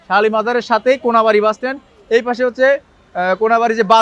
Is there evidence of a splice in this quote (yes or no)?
no